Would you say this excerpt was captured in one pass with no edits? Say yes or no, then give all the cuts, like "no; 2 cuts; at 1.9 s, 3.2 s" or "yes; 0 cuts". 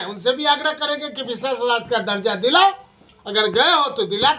yes; 0 cuts